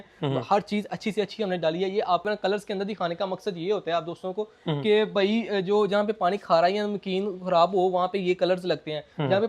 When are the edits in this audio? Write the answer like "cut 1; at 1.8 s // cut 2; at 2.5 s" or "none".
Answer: cut 1; at 2.2 s